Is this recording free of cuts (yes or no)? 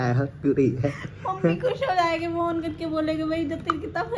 yes